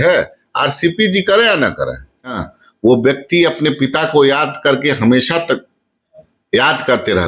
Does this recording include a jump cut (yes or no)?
yes